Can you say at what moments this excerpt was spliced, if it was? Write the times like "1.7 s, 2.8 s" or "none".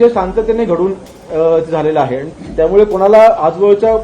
2.2 s